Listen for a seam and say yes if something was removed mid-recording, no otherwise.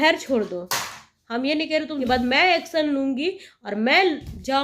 yes